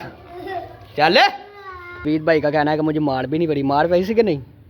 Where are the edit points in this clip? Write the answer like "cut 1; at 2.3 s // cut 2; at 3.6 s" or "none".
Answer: cut 1; at 2.0 s